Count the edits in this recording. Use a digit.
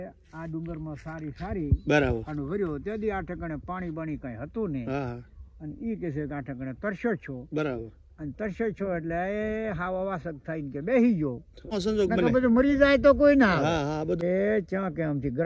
2